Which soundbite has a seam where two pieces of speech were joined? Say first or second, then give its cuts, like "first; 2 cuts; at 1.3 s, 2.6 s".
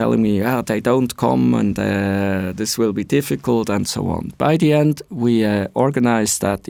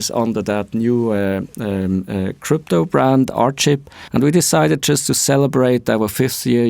second; 1 cut; at 4.0 s